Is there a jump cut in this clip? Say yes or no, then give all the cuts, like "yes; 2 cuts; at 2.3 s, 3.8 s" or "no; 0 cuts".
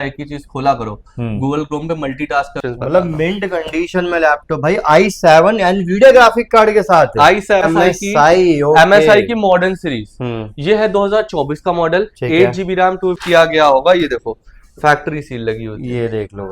yes; 3 cuts; at 2.6 s, 7.6 s, 13.2 s